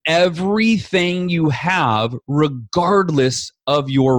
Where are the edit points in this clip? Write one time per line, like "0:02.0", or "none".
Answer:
none